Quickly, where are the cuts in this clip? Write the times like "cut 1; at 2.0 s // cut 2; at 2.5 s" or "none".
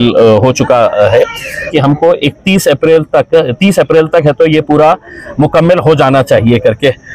cut 1; at 1.7 s